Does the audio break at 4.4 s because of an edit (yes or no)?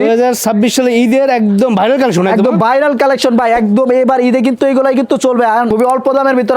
no